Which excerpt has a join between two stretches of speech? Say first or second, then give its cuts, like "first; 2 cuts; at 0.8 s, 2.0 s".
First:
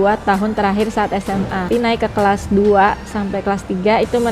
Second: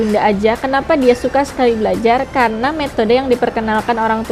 first; 1 cut; at 1.7 s